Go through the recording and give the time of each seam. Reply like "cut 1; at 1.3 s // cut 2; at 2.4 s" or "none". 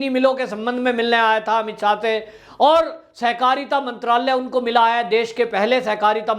none

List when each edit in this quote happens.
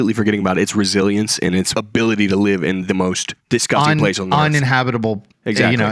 cut 1; at 1.7 s

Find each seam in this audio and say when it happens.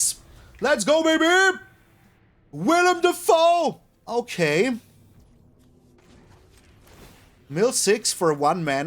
cut 1; at 3.9 s

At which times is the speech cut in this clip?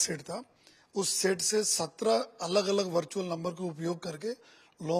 none

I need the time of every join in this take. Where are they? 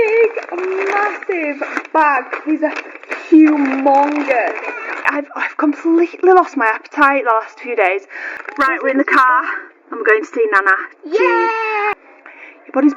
cut 1; at 5.1 s // cut 2; at 8.3 s // cut 3; at 11.9 s

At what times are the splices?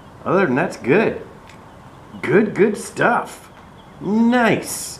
none

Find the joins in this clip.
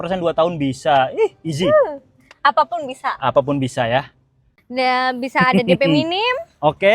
cut 1; at 4.5 s

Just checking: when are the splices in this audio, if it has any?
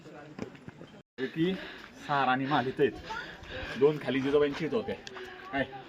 cut 1; at 1.0 s

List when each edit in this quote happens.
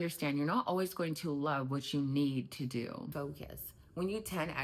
cut 1; at 3.1 s

